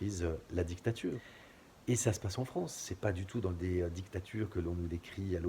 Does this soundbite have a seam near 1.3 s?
yes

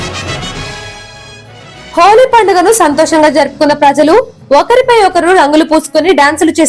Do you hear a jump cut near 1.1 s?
no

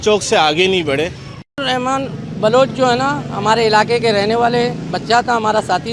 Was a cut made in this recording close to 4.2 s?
no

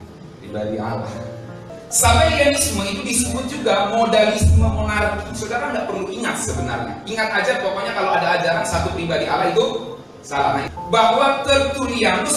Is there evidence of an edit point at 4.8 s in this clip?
no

